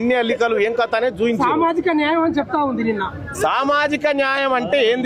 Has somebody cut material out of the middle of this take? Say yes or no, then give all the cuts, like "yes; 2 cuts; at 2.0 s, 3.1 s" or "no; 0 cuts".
no; 0 cuts